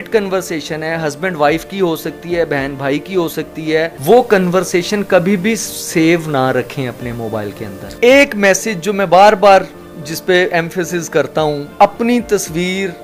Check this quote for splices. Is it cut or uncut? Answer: cut